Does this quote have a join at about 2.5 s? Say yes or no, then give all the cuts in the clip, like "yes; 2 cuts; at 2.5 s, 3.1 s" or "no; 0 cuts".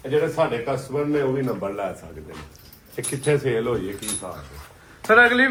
no; 0 cuts